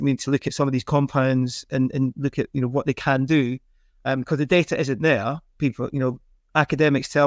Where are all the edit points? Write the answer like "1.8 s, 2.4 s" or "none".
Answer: none